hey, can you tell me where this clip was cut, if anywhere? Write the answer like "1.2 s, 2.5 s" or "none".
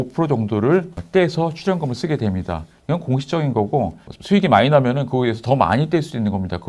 1.0 s, 4.1 s